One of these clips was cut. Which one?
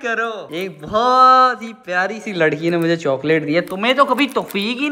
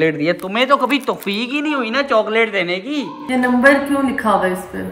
second; 1 cut; at 3.2 s

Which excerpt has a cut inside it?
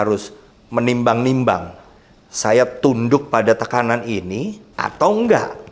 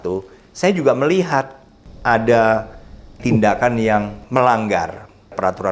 second; 2 cuts; at 3.2 s, 4.2 s

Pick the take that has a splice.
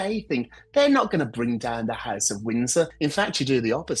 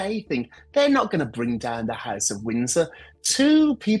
first; 1 cut; at 2.9 s

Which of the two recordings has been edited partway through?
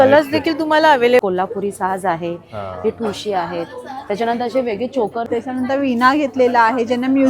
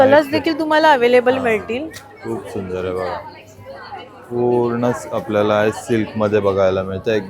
first; 2 cuts; at 1.2 s, 5.3 s

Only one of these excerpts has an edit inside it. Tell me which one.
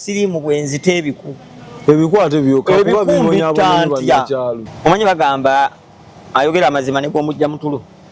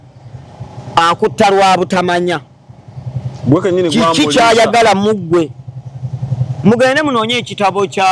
first; 1 cut; at 4.6 s

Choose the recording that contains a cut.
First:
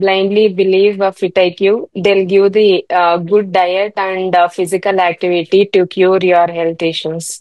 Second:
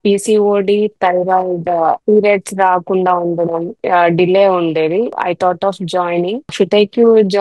second; 5 cuts; at 0.9 s, 2.0 s, 3.8 s, 5.2 s, 6.5 s

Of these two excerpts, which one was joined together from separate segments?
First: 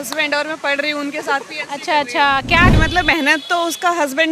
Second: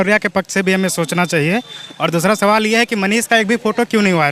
first; 1 cut; at 2.7 s

